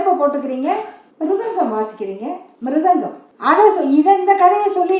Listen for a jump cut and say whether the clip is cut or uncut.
cut